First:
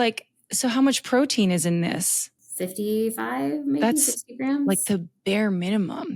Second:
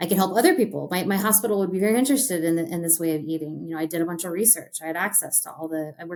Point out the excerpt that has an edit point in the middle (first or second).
first